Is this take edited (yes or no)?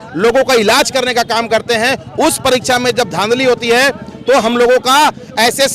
no